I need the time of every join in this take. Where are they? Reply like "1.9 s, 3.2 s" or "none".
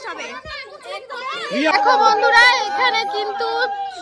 1.7 s